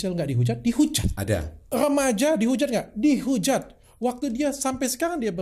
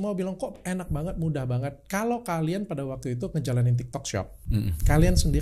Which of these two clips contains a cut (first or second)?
first